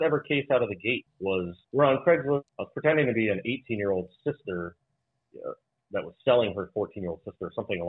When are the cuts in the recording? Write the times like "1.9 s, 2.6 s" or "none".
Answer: 1.3 s, 2.5 s